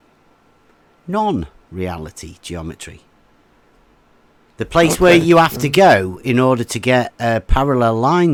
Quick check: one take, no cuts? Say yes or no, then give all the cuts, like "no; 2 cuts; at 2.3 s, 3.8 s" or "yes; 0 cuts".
yes; 0 cuts